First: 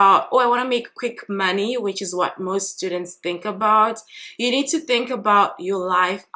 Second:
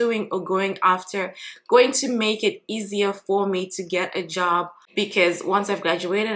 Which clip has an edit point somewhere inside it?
second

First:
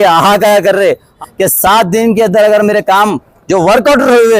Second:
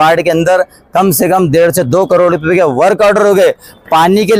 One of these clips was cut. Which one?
first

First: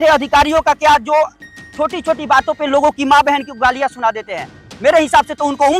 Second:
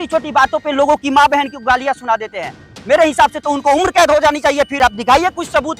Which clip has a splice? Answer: second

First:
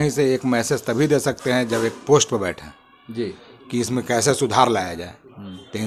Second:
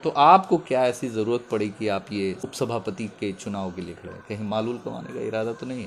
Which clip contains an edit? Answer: second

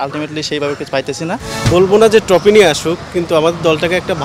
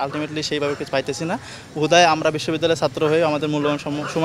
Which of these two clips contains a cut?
first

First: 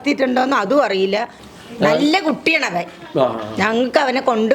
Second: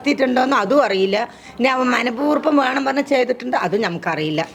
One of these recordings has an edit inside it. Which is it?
first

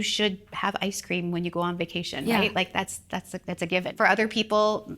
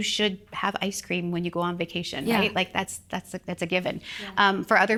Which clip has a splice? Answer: first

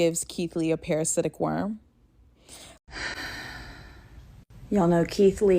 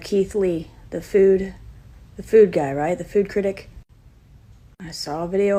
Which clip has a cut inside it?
first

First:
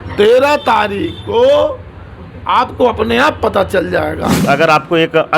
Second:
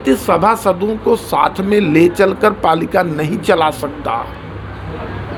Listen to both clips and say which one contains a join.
first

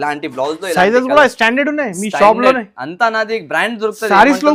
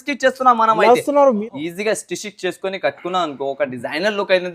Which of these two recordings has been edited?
second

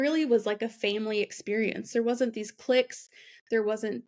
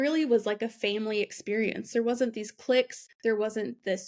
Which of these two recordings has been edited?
second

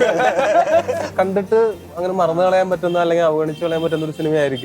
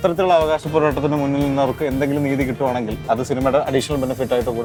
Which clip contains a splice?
first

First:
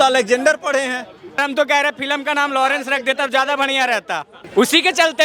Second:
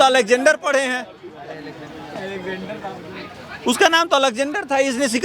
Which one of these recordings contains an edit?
first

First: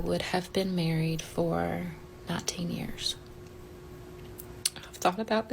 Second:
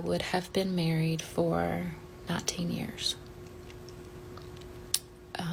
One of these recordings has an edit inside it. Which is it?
first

